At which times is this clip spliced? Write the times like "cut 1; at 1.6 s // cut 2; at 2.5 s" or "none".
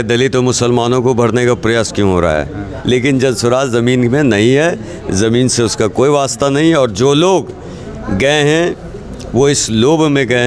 cut 1; at 2.7 s